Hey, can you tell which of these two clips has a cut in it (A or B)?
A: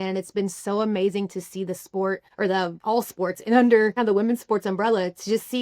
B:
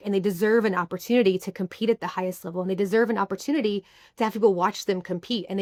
A